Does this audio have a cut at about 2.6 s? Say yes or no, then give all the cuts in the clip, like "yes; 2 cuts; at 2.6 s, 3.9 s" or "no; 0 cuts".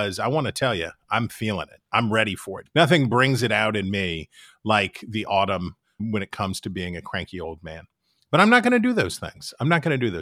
yes; 2 cuts; at 2.6 s, 5.9 s